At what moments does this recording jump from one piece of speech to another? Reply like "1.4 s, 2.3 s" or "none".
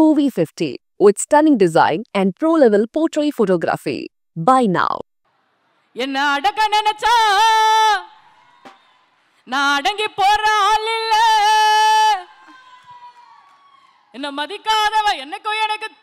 4.8 s